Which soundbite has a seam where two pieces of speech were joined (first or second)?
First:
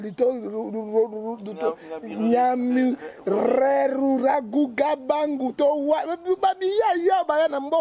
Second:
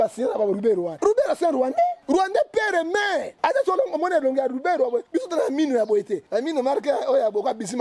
second